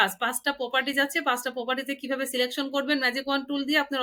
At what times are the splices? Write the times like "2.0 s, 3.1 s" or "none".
none